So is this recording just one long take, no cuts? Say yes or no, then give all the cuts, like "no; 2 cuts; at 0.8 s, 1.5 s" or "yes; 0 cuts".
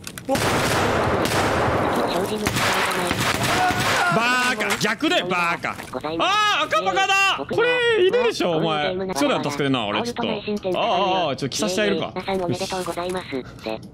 no; 3 cuts; at 5.9 s, 7.5 s, 9.1 s